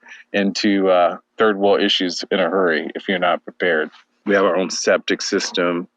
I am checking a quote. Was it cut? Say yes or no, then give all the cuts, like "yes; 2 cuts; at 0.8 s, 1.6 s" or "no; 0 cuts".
yes; 2 cuts; at 1.2 s, 4.0 s